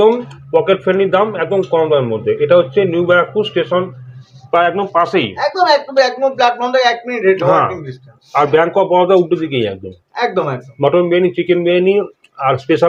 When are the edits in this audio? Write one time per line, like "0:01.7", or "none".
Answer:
none